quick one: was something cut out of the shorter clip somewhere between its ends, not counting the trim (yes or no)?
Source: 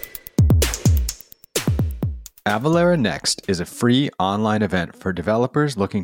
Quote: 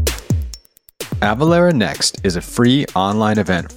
yes